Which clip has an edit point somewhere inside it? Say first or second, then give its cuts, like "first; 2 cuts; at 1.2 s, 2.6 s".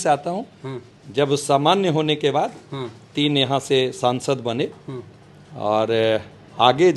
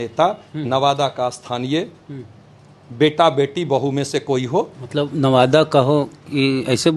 second; 1 cut; at 4.8 s